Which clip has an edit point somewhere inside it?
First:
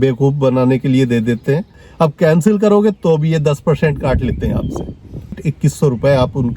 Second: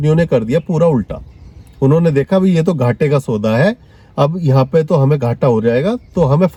first; 2 cuts; at 1.8 s, 5.5 s

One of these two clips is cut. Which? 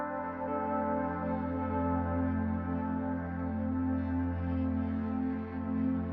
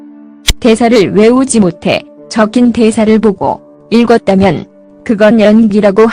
first; 1 cut; at 2.4 s

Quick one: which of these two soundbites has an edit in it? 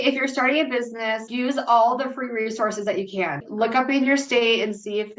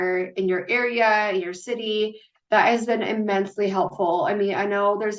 first; 2 cuts; at 1.3 s, 3.4 s

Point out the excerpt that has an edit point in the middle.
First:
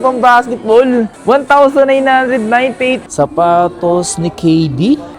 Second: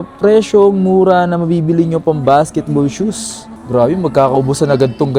first; 1 cut; at 3.0 s

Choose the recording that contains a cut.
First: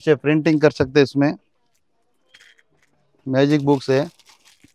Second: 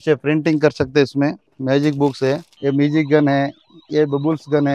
second; 2 cuts; at 1.5 s, 2.5 s

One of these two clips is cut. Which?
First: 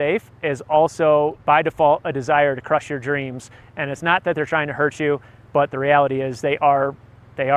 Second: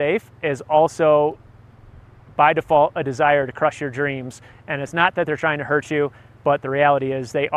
first; 1 cut; at 1.4 s

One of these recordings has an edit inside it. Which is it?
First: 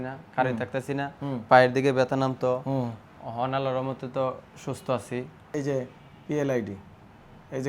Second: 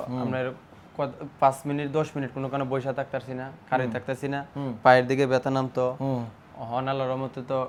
first; 1 cut; at 5.4 s

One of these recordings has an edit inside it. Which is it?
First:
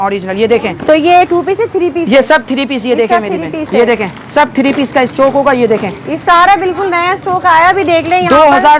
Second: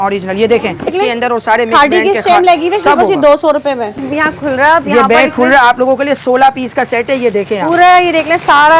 second; 2 cuts; at 0.9 s, 4.0 s

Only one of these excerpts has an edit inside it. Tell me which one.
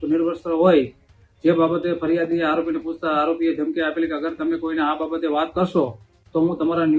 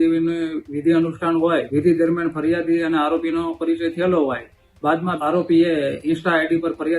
second; 2 cuts; at 1.7 s, 5.2 s

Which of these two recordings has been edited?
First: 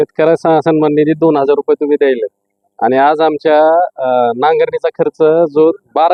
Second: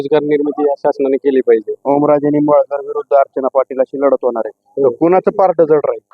second; 1 cut; at 1.7 s

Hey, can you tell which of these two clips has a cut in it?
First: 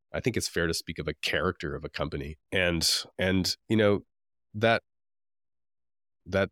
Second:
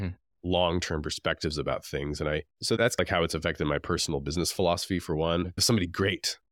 second; 1 cut; at 5.6 s

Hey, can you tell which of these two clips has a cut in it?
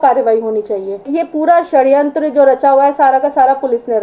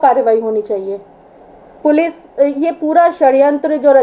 first; 1 cut; at 1.1 s

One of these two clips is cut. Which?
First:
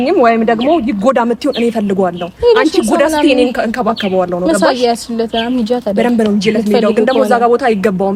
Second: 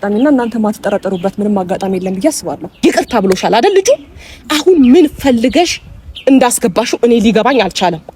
second; 1 cut; at 2.7 s

